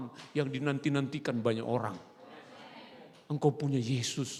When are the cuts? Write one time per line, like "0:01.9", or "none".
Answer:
none